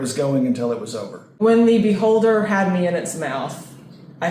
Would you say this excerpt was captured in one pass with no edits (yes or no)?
no